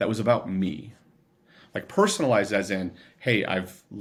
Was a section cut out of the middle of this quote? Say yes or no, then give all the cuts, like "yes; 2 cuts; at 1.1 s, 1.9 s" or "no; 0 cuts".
no; 0 cuts